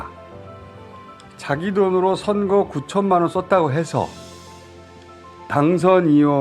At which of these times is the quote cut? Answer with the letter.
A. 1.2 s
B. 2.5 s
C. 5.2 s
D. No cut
D